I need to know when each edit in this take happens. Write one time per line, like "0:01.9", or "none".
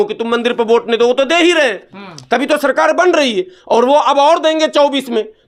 none